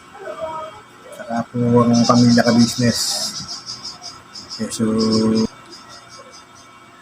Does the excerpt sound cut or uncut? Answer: cut